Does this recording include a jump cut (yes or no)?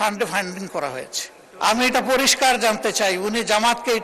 yes